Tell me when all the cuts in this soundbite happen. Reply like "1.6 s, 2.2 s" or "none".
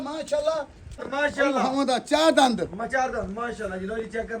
1.1 s